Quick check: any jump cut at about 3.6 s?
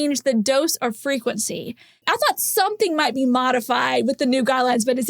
no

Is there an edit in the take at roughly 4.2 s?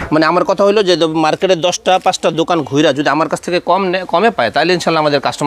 no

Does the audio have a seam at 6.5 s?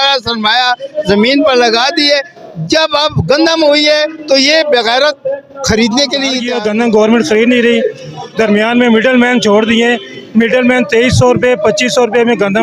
yes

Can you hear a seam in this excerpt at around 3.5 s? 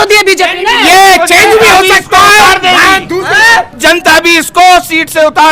no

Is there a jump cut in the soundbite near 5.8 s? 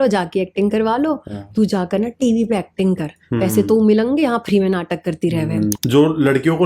yes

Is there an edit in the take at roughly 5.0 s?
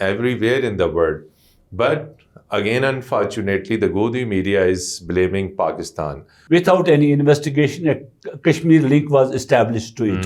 no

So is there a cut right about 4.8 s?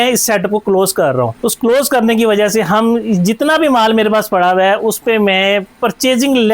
no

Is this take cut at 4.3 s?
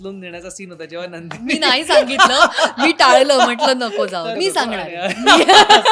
yes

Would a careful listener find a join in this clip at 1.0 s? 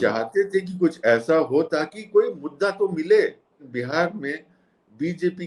no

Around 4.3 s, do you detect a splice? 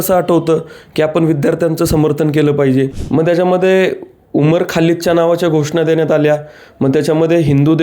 no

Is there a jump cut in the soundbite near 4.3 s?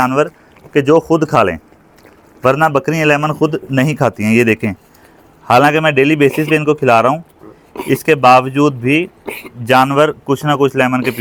no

